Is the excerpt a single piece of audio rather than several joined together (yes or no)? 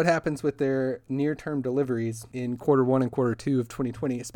no